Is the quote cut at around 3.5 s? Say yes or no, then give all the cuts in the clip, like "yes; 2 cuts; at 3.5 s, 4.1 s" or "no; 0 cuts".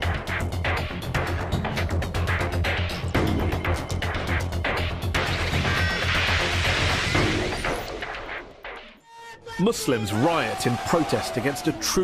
no; 1 cut; at 7.3 s